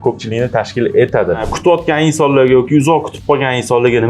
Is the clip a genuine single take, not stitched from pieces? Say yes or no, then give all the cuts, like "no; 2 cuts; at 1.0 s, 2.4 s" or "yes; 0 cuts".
no; 1 cut; at 1.4 s